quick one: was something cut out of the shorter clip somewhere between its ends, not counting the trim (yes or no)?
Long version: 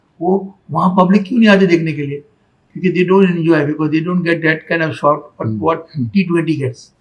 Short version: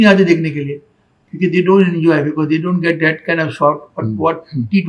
no